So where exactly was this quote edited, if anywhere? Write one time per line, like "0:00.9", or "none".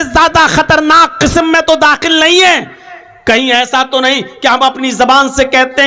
none